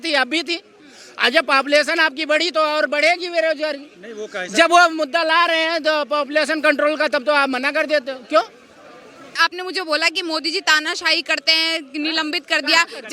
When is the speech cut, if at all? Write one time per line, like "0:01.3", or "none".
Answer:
0:09.4